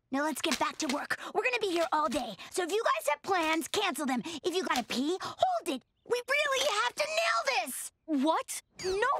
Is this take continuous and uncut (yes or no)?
yes